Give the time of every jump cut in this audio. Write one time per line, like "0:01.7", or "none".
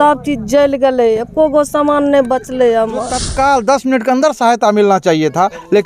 0:03.2